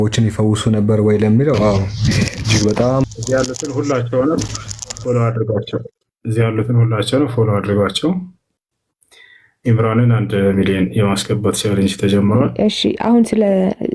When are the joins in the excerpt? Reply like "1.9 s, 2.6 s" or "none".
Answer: 3.0 s, 12.5 s